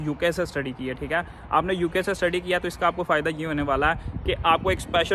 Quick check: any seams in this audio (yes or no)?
no